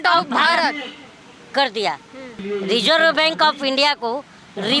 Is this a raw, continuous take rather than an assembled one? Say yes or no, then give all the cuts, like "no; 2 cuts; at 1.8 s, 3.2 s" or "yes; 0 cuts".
no; 1 cut; at 2.3 s